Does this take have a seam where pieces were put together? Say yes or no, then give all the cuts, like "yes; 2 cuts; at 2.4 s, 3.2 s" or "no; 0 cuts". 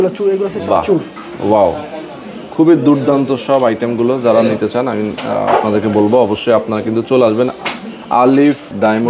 no; 0 cuts